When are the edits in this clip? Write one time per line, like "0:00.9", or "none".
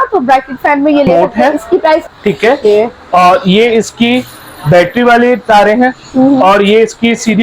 0:02.0